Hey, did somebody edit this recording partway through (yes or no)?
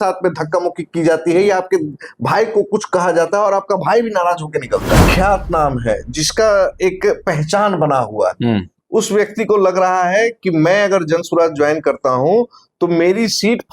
yes